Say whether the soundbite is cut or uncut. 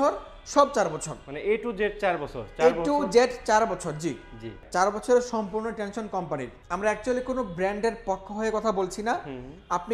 cut